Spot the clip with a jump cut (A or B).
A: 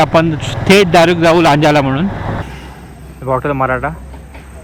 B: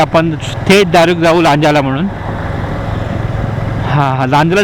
A